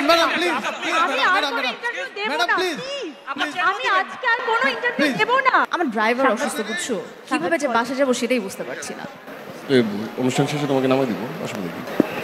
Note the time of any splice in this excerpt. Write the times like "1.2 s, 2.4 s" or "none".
5.7 s